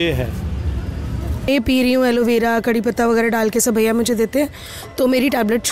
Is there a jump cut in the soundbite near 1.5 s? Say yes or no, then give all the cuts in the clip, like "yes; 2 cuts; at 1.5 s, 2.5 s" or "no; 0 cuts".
yes; 1 cut; at 1.5 s